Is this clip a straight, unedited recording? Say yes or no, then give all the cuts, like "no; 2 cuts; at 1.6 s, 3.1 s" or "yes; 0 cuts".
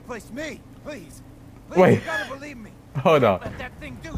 yes; 0 cuts